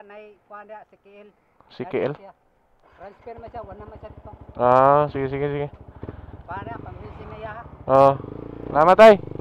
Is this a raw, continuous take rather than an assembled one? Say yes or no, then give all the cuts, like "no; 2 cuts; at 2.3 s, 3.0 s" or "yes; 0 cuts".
yes; 0 cuts